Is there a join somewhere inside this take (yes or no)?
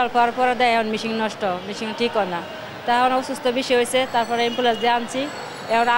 no